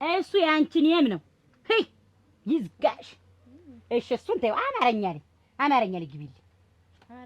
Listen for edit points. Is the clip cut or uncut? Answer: uncut